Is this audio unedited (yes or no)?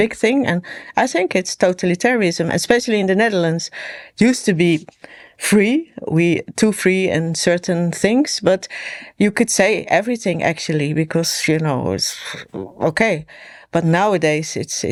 yes